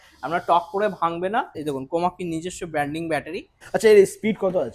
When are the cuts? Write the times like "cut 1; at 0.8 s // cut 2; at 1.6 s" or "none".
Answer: cut 1; at 1.6 s // cut 2; at 3.5 s